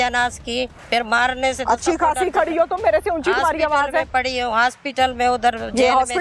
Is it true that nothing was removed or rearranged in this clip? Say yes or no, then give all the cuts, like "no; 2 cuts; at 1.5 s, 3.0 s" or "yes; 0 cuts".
yes; 0 cuts